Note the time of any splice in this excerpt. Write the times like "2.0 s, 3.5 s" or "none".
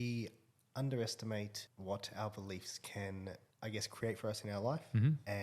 1.7 s, 3.5 s